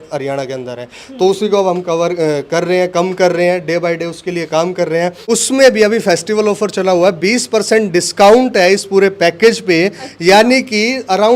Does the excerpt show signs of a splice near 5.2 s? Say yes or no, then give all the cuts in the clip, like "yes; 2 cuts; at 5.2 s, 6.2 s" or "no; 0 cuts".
yes; 1 cut; at 5.2 s